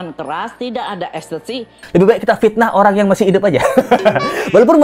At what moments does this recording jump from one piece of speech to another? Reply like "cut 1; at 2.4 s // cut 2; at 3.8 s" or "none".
cut 1; at 1.8 s

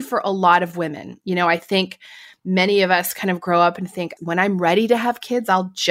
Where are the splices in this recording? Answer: cut 1; at 4.1 s

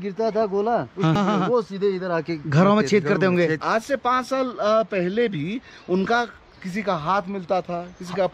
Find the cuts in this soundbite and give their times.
cut 1; at 1.1 s // cut 2; at 3.6 s

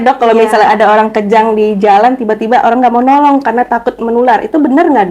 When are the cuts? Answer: none

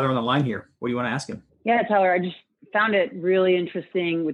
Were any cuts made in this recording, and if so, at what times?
none

